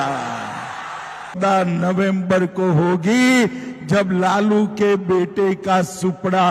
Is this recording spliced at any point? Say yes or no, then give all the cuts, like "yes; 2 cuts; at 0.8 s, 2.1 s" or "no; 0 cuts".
yes; 1 cut; at 1.4 s